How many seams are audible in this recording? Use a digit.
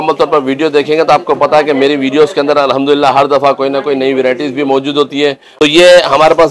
1